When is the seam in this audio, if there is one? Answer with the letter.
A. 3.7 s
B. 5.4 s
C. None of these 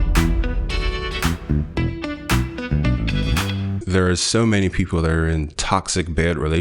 A